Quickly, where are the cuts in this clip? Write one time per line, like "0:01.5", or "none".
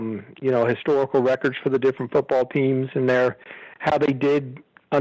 none

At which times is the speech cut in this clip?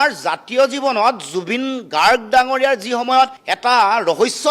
none

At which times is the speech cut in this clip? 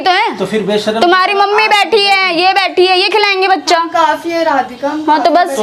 none

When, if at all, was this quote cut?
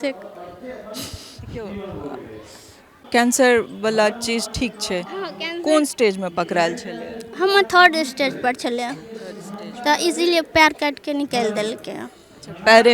0:02.9

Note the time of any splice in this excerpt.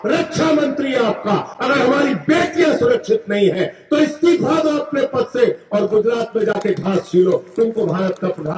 none

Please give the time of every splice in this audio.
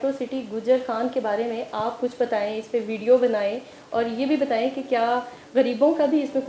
none

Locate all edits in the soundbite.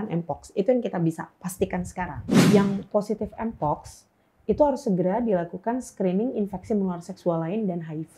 0:02.5

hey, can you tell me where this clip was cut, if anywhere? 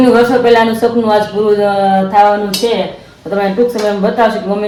none

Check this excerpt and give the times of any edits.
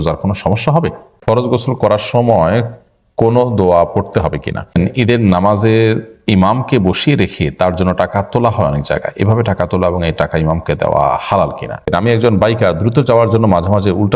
0:01.2
0:04.7
0:11.8

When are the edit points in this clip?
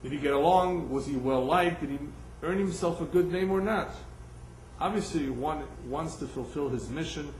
0:03.1

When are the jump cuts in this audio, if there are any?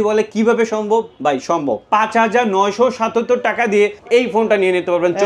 0:01.8
0:04.0

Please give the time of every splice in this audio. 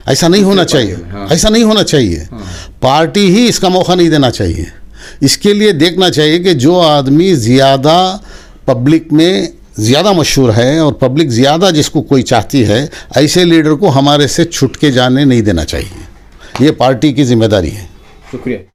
none

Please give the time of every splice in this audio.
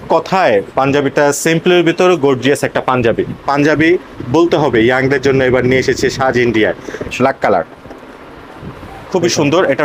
0:03.4
0:07.1

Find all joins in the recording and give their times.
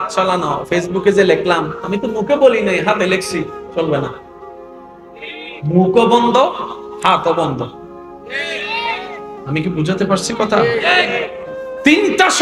none

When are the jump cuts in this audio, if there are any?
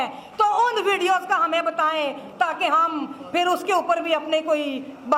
none

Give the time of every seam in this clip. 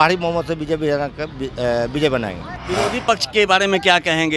0:02.5

